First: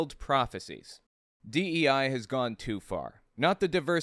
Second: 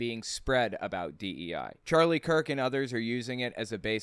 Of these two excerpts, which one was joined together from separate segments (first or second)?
first